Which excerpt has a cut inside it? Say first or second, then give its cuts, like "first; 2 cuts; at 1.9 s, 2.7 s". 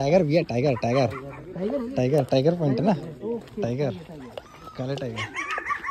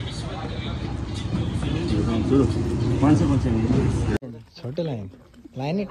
second; 1 cut; at 4.2 s